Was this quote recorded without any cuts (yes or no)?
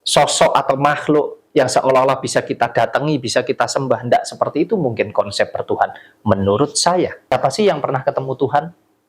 no